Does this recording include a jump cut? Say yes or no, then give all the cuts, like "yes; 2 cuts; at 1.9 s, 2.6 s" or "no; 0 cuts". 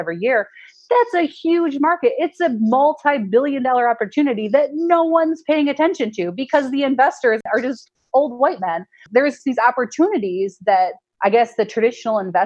yes; 3 cuts; at 7.4 s, 9.1 s, 11.0 s